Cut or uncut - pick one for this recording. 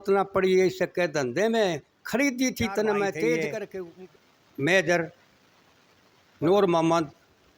cut